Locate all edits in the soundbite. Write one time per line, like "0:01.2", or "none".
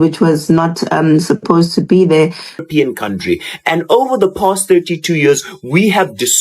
0:02.6